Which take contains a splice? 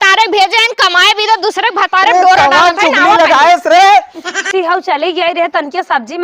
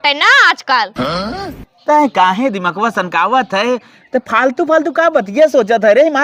first; 1 cut; at 4.5 s

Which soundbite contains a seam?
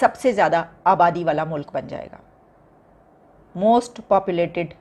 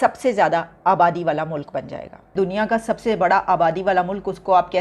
second; 1 cut; at 2.3 s

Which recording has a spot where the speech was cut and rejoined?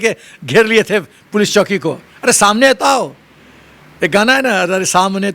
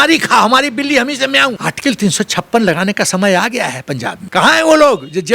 second; 2 cuts; at 1.6 s, 4.1 s

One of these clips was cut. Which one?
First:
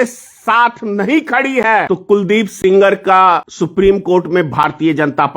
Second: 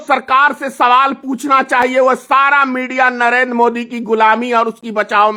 first; 2 cuts; at 1.9 s, 3.5 s

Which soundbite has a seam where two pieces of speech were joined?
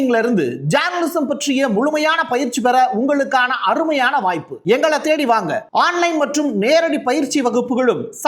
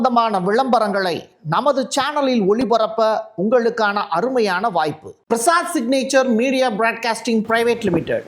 second; 1 cut; at 5.1 s

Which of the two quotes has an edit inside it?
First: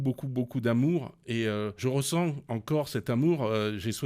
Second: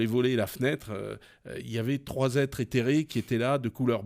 first; 1 cut; at 1.8 s

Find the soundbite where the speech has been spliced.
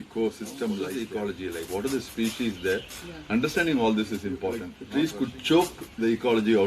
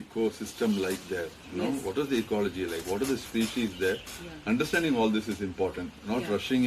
first; 2 cuts; at 0.9 s, 4.7 s

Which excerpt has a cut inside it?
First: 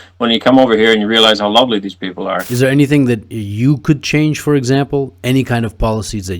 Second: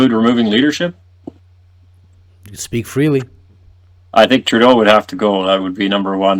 first; 1 cut; at 2.5 s

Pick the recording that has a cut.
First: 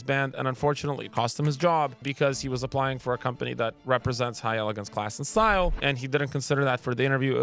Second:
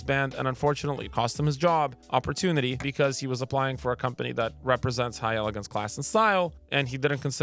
first; 2 cuts; at 2.0 s, 5.8 s

